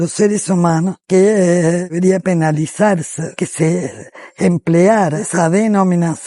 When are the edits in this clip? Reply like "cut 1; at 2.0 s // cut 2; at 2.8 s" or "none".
cut 1; at 1.0 s // cut 2; at 2.2 s // cut 3; at 3.4 s // cut 4; at 5.2 s